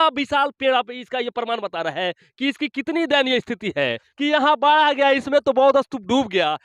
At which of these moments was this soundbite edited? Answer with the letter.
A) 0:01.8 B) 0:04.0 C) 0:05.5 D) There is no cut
B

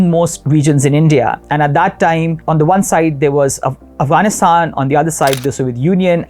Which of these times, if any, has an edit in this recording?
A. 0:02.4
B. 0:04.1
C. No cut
A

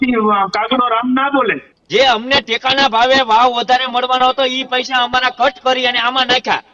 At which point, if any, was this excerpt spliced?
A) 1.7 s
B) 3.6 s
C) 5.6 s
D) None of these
A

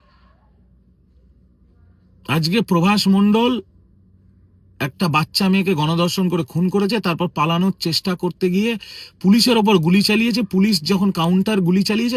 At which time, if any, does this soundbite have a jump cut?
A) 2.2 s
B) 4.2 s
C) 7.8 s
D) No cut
D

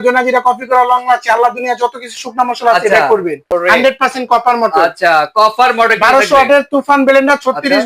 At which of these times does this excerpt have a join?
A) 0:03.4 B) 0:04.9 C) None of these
A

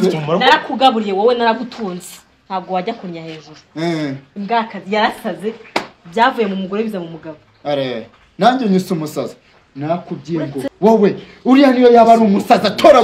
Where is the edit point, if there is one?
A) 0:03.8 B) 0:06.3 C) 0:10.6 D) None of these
C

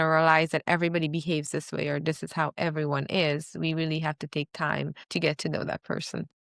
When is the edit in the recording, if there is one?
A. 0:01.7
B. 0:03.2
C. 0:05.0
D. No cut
C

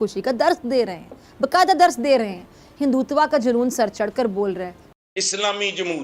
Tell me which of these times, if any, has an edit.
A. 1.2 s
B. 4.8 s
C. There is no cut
B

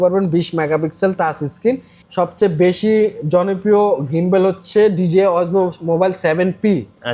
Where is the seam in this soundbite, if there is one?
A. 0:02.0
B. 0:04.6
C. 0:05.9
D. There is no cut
A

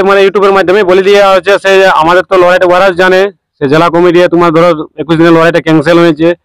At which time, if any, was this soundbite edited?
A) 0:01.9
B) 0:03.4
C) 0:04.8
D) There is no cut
D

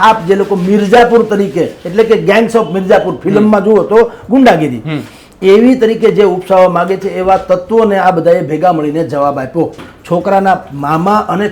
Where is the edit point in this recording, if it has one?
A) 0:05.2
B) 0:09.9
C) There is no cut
B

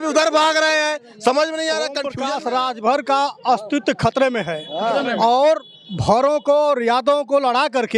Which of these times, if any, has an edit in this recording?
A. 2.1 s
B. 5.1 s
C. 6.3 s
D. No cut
A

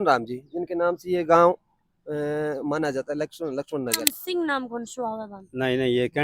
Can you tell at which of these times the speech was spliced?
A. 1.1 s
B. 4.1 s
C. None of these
B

